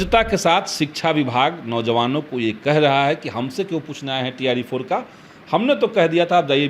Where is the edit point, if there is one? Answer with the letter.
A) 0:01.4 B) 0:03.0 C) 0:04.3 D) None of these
D